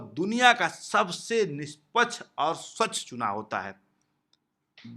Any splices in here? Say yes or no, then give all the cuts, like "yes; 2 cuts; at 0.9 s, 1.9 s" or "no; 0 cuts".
no; 0 cuts